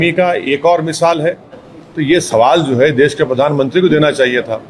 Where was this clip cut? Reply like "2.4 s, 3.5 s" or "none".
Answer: 1.5 s